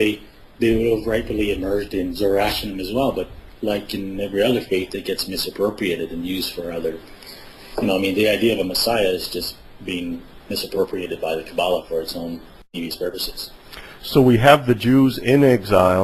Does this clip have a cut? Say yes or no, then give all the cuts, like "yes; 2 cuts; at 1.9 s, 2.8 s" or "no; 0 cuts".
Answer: yes; 1 cut; at 10.3 s